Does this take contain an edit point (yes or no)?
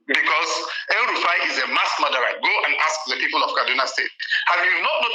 no